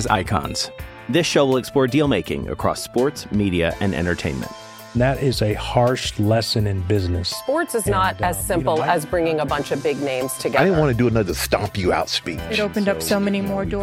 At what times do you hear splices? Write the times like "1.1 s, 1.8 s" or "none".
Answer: none